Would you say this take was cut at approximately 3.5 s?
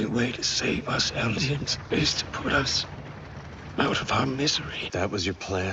no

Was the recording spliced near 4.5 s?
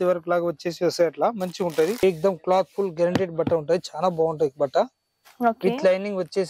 no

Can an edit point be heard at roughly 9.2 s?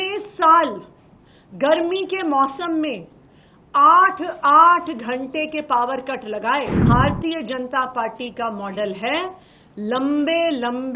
no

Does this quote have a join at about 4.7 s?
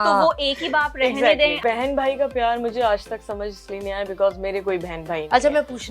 no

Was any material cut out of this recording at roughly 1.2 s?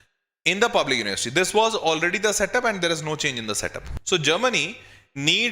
no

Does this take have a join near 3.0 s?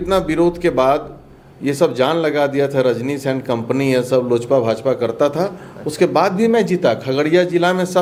no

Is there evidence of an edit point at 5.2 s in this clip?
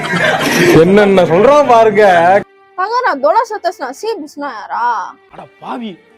yes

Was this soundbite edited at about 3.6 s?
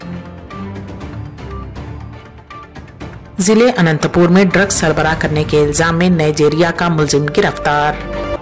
no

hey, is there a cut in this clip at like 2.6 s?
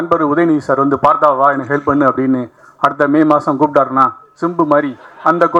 no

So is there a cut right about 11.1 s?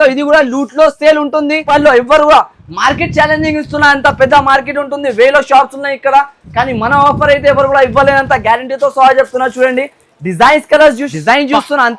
yes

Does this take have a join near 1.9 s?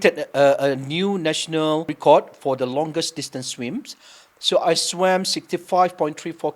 yes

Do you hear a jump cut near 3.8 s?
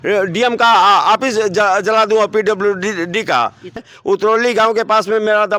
yes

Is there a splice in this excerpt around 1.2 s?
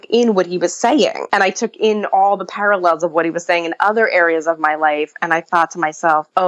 yes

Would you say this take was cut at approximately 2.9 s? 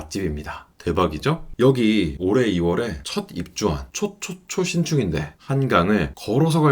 no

